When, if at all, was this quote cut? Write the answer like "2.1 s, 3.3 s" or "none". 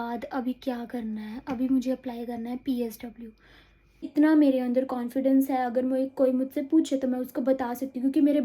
4.1 s